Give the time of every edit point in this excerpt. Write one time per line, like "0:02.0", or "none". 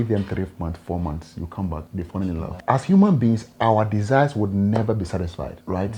0:02.6